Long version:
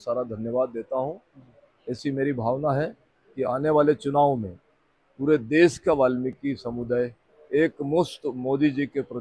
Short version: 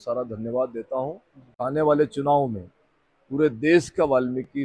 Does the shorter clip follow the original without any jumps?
no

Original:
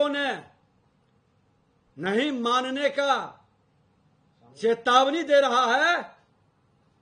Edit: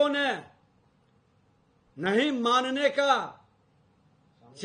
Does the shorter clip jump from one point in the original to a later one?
no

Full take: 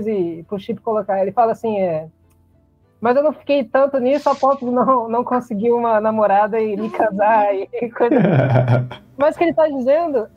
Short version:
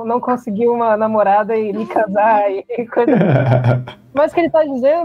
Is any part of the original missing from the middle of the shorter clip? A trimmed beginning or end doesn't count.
no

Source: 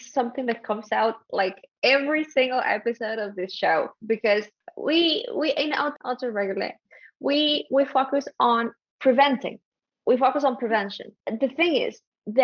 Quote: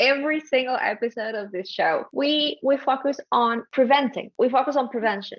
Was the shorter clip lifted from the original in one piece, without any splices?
no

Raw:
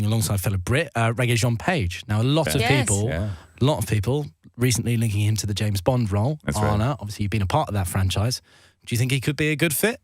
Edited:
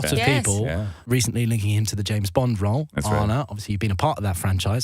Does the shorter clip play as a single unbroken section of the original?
no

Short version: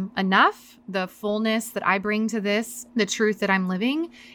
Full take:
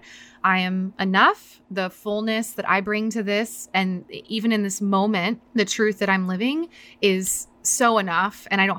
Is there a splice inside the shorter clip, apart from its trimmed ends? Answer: yes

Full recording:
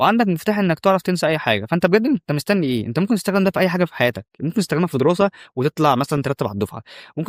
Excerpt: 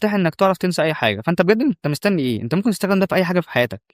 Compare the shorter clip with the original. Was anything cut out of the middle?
no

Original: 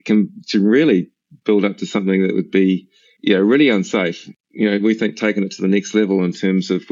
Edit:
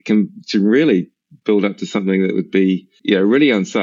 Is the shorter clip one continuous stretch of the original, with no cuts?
no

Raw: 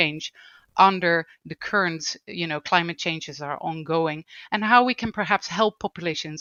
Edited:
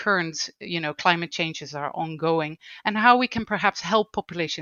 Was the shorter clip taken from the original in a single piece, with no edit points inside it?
yes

